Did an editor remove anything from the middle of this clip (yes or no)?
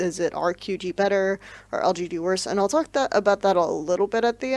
no